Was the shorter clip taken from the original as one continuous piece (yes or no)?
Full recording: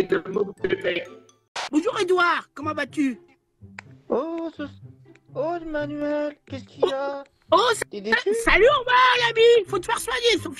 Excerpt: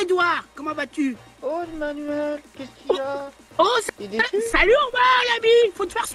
no